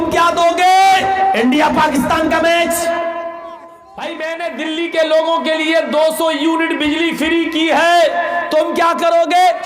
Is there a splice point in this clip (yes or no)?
yes